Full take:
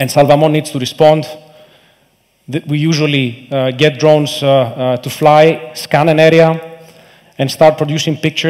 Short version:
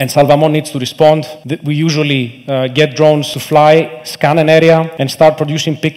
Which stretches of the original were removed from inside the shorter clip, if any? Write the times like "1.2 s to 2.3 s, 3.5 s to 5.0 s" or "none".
1.4 s to 2.4 s, 4.4 s to 5.0 s, 6.7 s to 7.4 s